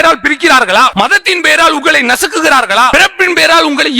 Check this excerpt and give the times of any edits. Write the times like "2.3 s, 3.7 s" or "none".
0.9 s, 2.9 s